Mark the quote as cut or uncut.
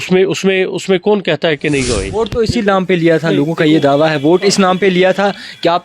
cut